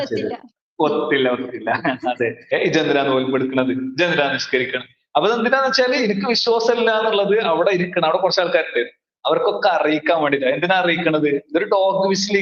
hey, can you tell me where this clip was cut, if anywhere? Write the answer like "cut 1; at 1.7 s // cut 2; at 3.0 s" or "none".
cut 1; at 2.5 s